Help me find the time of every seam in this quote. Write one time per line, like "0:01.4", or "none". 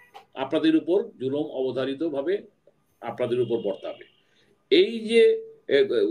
none